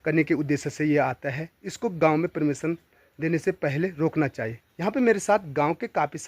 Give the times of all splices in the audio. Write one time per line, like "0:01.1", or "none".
0:04.6